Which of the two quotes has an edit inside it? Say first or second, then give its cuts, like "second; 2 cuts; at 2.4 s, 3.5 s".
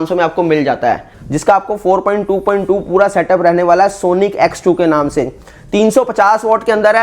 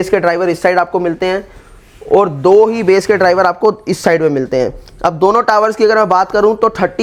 first; 1 cut; at 1.1 s